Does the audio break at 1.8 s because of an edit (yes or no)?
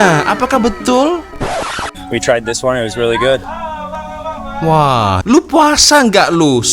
yes